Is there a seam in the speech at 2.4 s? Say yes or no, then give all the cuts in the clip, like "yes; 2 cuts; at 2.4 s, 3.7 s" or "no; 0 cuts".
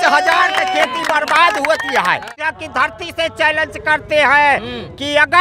yes; 1 cut; at 2.4 s